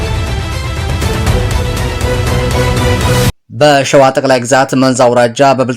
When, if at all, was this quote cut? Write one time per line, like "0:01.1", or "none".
0:03.4

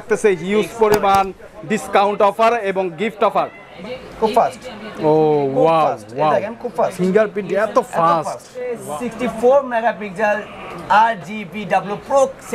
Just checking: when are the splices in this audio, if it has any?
0:03.6
0:08.8

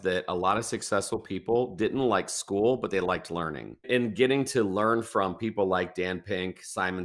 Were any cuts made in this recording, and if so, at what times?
0:03.9

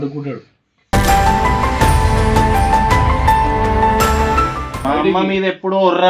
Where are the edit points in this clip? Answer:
0:04.7

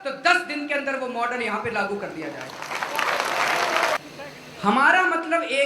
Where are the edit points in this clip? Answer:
0:04.0

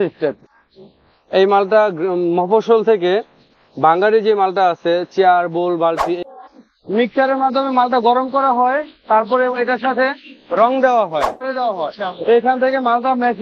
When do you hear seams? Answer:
0:06.2
0:11.5

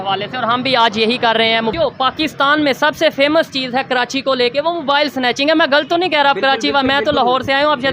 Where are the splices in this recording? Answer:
0:01.7

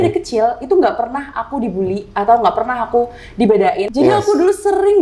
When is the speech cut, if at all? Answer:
0:03.9

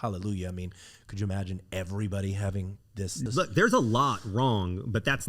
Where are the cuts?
0:03.3

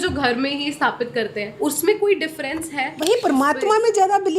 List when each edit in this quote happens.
0:01.4
0:02.9

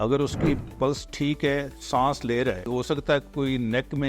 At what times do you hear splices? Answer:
0:01.8
0:02.7

